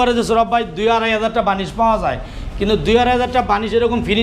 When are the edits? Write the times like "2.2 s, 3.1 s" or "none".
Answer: none

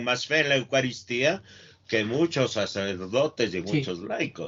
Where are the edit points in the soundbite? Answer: none

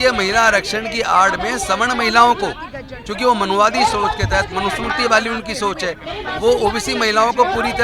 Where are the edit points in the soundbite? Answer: none

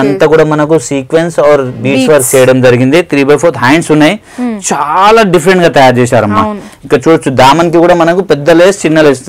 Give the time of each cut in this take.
none

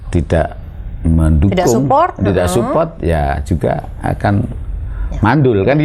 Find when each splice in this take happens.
none

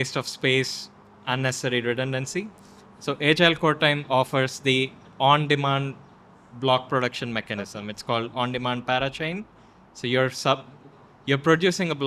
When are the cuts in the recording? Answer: none

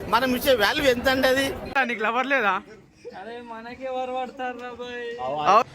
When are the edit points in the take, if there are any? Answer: 1.7 s

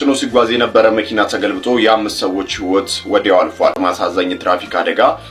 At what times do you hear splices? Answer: 3.8 s

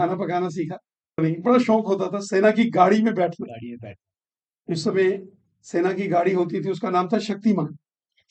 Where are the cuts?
1.2 s

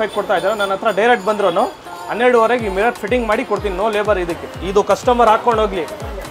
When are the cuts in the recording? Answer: 4.5 s

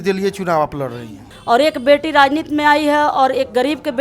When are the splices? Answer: 1.3 s

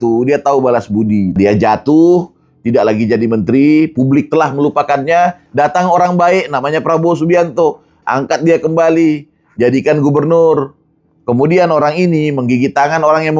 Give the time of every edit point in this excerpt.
1.3 s, 5.4 s

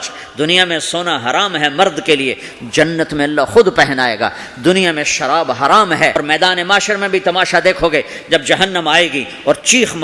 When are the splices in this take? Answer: 6.2 s

